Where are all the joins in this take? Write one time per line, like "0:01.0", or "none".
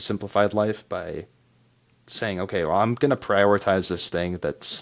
none